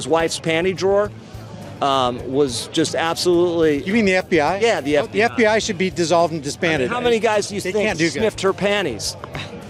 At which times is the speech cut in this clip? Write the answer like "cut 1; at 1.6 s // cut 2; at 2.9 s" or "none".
none